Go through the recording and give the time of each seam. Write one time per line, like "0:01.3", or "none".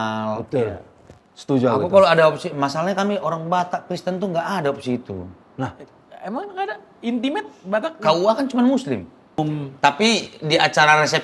0:09.4